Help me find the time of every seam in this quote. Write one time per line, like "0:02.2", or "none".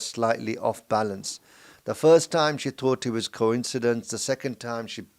none